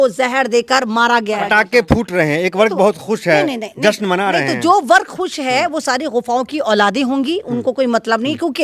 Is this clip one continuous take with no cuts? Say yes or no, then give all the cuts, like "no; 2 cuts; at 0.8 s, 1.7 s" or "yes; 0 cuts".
no; 1 cut; at 1.4 s